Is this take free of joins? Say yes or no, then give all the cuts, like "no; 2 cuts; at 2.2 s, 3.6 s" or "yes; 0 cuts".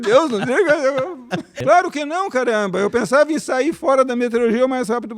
no; 1 cut; at 1.5 s